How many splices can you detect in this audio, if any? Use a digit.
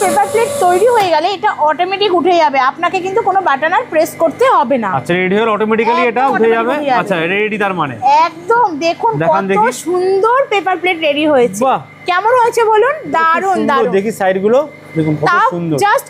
0